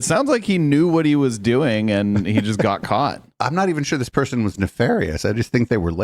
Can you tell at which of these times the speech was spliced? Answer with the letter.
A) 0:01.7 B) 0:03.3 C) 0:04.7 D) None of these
B